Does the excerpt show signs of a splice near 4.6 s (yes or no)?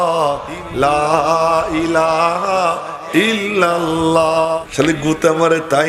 yes